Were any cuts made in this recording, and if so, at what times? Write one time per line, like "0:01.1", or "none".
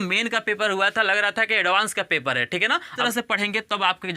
0:02.9